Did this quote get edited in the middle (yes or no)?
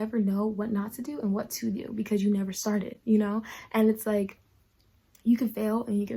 no